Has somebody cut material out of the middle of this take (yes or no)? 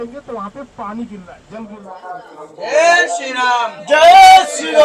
yes